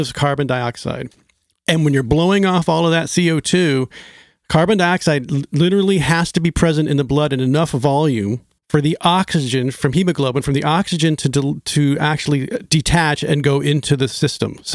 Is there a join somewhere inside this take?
yes; 1 cut; at 8.5 s

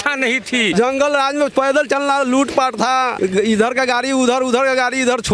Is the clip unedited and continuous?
no; 2 cuts; at 0.7 s, 3.1 s

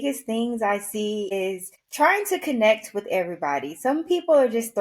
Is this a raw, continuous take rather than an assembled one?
no; 1 cut; at 1.3 s

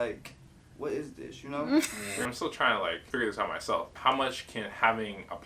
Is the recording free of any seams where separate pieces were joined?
no; 3 cuts; at 2.1 s, 3.0 s, 3.9 s

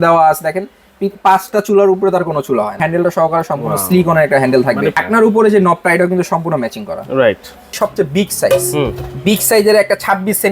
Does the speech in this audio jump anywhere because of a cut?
yes; 3 cuts; at 2.8 s, 5.0 s, 7.7 s

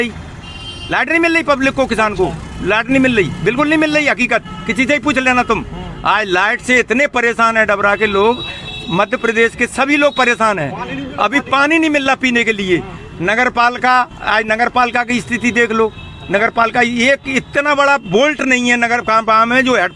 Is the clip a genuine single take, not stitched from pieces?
yes; 0 cuts

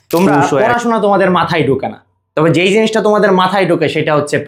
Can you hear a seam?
no; 0 cuts

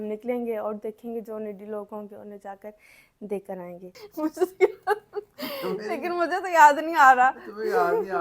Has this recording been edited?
yes; 1 cut; at 4.0 s

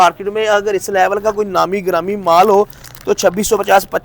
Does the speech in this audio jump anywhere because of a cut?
no; 0 cuts

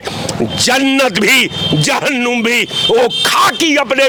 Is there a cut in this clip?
no; 0 cuts

